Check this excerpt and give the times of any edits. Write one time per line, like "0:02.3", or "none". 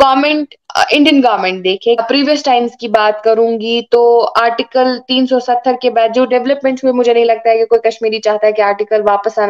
0:02.0